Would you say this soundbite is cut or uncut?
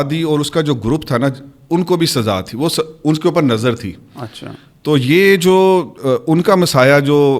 uncut